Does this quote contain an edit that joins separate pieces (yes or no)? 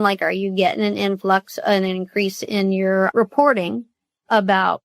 yes